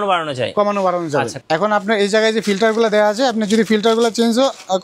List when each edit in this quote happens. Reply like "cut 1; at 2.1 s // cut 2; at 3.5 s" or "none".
cut 1; at 1.3 s